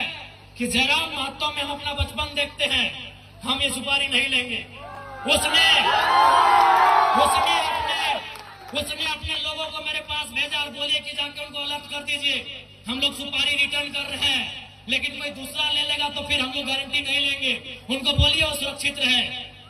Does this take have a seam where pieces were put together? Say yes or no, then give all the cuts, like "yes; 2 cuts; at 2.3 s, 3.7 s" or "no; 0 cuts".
no; 0 cuts